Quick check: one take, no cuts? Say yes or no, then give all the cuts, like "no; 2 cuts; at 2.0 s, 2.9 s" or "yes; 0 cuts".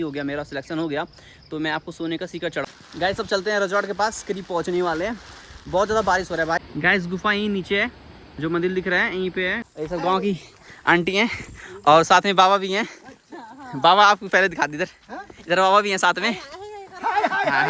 no; 3 cuts; at 2.6 s, 6.6 s, 9.6 s